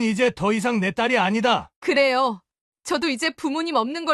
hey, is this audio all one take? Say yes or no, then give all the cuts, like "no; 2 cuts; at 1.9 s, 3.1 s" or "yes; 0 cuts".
no; 1 cut; at 1.7 s